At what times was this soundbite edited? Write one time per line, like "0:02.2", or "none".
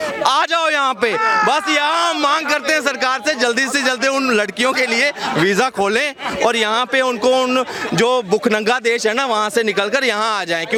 none